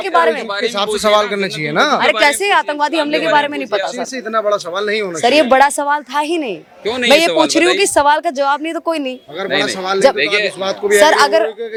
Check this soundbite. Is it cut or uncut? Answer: uncut